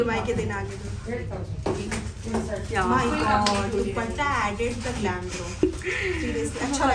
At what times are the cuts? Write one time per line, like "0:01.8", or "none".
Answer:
none